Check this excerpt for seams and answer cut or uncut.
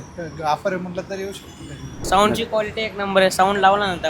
cut